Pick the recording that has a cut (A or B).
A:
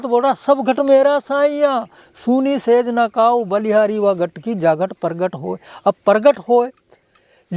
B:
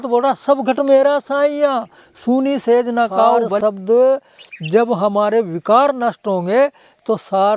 B